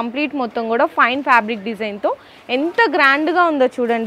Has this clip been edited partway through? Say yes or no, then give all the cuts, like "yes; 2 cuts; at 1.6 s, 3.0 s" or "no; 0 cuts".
no; 0 cuts